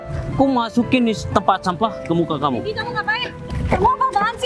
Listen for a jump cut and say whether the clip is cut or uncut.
uncut